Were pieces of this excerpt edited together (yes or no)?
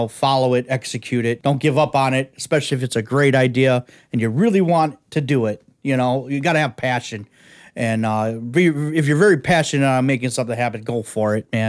yes